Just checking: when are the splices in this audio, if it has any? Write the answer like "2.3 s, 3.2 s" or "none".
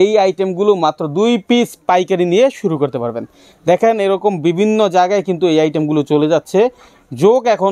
none